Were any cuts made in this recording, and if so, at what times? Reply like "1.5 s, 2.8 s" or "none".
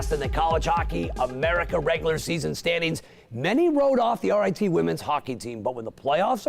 2.5 s